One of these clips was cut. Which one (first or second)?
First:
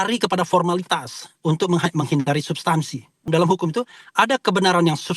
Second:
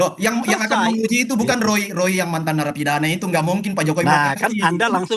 first